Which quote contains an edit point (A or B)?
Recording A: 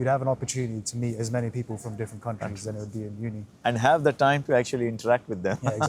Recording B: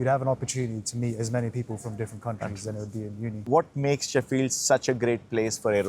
B